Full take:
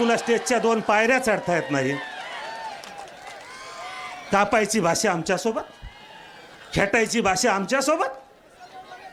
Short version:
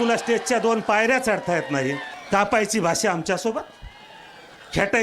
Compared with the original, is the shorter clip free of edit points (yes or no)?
no